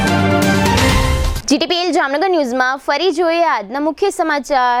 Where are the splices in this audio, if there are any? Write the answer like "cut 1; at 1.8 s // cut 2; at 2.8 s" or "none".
none